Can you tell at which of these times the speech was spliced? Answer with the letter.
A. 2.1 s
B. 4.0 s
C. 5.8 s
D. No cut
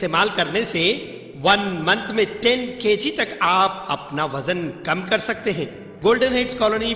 C